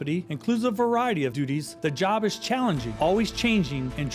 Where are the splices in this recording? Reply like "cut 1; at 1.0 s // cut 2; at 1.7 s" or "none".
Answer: cut 1; at 1.7 s // cut 2; at 2.9 s